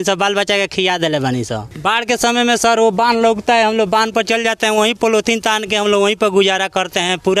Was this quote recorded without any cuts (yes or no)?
no